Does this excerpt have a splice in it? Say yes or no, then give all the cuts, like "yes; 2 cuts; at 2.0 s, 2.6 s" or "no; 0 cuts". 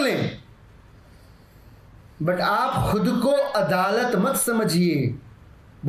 no; 0 cuts